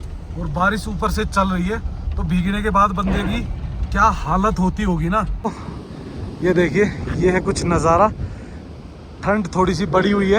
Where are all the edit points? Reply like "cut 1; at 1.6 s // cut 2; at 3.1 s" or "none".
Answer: cut 1; at 5.3 s